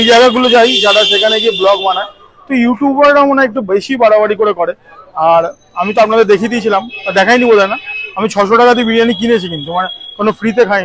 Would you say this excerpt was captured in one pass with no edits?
yes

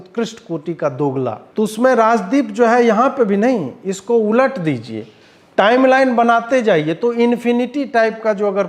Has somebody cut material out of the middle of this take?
yes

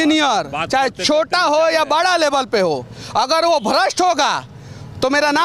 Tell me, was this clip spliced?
no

